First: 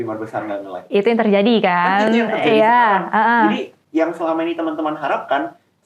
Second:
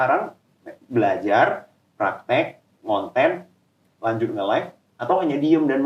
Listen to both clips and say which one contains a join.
first; 1 cut; at 3.8 s

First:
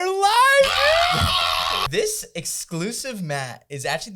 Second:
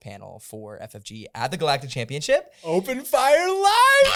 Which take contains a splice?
first; 1 cut; at 1.8 s

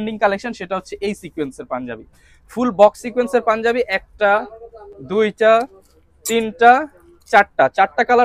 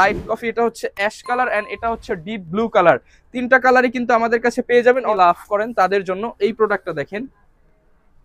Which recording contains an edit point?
second; 1 cut; at 5.1 s

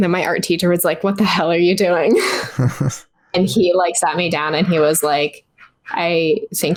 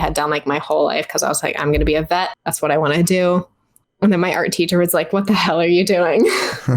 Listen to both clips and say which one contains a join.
second; 1 cut; at 2.4 s

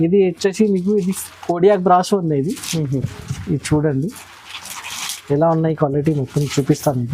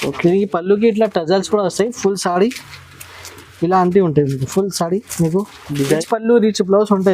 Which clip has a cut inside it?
second; 1 cut; at 6.0 s

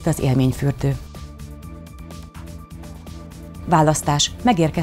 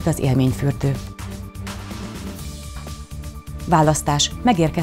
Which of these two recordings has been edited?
second; 2 cuts; at 0.9 s, 3.2 s

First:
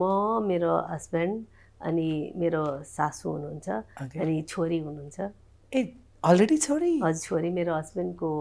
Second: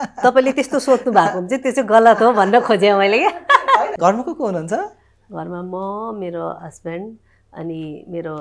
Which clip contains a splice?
second; 1 cut; at 3.7 s

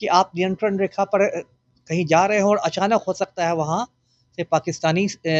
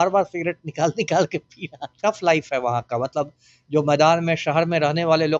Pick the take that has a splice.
second; 1 cut; at 2.0 s

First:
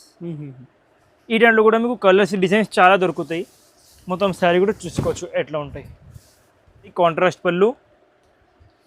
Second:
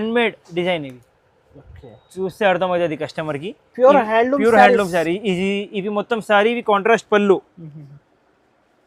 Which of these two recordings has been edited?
first; 1 cut; at 6.9 s

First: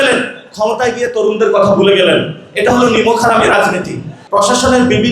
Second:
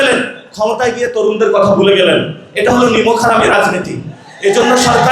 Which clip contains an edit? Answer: first; 1 cut; at 4.1 s

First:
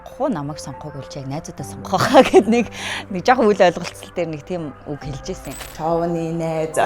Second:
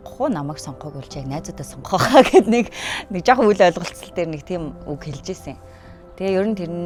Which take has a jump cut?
first; 1 cut; at 5.6 s

